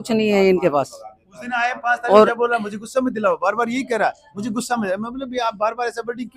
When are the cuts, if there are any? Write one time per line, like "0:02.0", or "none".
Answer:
none